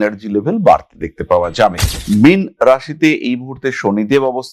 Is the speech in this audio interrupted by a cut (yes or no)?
yes